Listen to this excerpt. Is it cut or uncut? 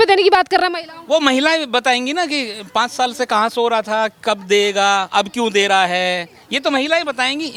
uncut